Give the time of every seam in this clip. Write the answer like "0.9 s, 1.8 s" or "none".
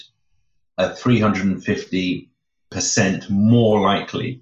2.7 s

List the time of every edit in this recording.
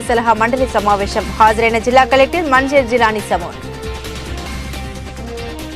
none

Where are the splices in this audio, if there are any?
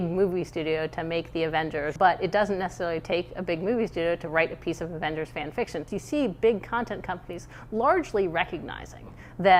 1.9 s, 5.9 s

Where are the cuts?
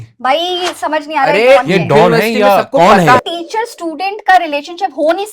3.2 s

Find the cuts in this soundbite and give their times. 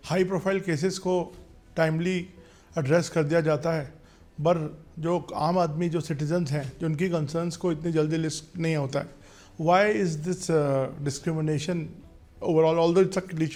none

